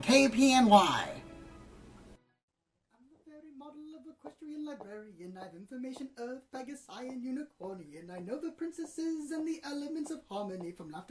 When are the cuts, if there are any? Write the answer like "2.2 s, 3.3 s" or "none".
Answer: 9.6 s